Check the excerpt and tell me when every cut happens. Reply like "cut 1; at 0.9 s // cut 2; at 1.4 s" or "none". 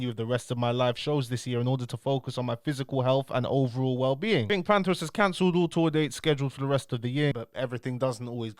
cut 1; at 4.5 s // cut 2; at 7.4 s